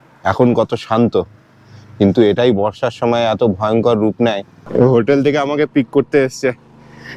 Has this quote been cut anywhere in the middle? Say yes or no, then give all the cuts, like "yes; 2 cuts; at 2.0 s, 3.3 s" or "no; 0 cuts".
yes; 1 cut; at 4.6 s